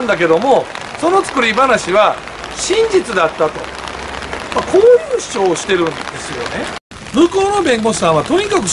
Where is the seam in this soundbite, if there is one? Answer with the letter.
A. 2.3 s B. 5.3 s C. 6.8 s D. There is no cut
C